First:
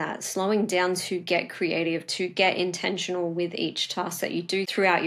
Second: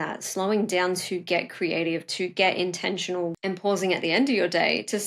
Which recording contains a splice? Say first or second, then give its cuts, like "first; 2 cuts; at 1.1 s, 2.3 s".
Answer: second; 1 cut; at 3.3 s